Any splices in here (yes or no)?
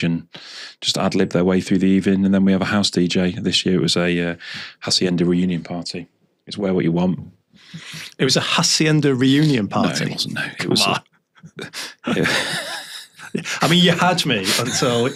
no